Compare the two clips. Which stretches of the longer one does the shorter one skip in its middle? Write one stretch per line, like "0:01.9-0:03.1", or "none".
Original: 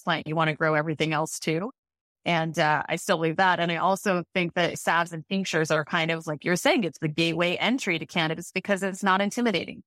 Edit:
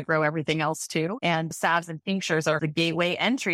0:02.0-0:04.8
0:05.8-0:07.0